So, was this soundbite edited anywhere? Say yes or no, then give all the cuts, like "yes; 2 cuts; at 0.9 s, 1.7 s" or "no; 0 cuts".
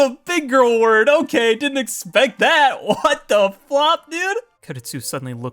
yes; 1 cut; at 4.6 s